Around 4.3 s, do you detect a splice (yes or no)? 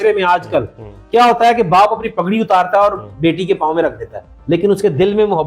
yes